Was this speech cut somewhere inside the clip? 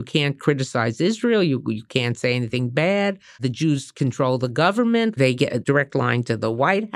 yes; 2 cuts; at 3.4 s, 5.6 s

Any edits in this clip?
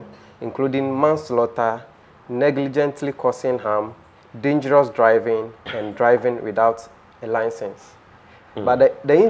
no; 0 cuts

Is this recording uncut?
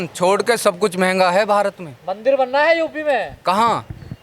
yes; 0 cuts

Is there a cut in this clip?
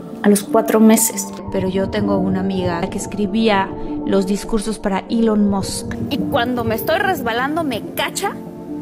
yes; 1 cut; at 6.0 s

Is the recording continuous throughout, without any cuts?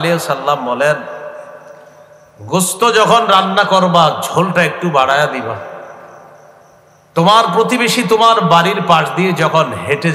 yes; 0 cuts

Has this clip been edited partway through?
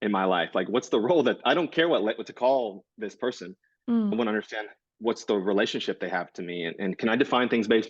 yes; 1 cut; at 4.1 s

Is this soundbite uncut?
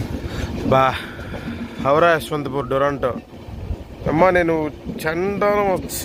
yes; 0 cuts

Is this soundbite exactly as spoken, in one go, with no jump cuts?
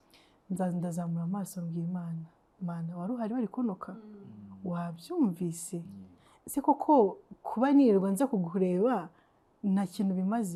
yes; 0 cuts

